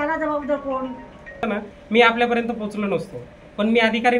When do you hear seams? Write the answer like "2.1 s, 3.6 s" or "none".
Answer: 1.4 s